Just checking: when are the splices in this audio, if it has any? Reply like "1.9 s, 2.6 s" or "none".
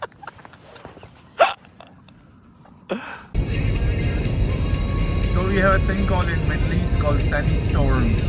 3.4 s